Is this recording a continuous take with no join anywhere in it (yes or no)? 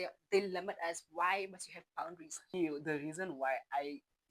no